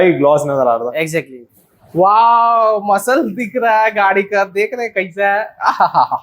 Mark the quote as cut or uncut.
cut